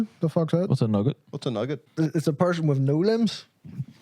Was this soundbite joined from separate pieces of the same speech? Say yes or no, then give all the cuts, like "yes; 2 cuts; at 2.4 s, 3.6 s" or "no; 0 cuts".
yes; 1 cut; at 1.8 s